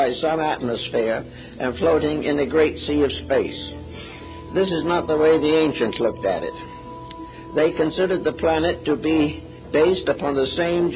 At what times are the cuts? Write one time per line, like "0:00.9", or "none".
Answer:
0:07.7